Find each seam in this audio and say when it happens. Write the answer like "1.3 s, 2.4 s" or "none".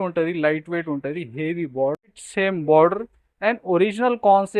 2.2 s